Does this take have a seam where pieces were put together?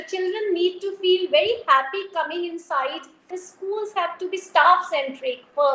yes; 1 cut; at 3.4 s

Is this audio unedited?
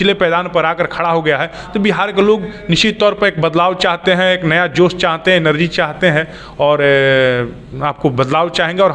yes; 0 cuts

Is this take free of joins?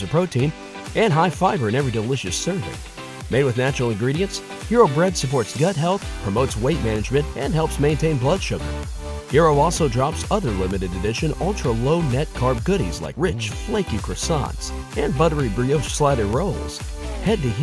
yes; 0 cuts

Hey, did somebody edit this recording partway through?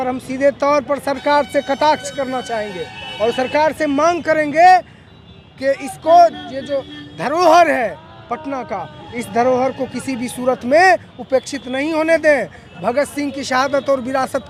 no; 0 cuts

